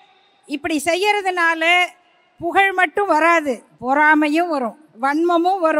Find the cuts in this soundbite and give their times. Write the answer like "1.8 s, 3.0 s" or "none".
3.7 s, 4.8 s